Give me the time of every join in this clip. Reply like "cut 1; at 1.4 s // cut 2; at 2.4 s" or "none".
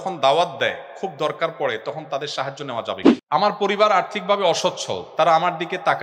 cut 1; at 3.1 s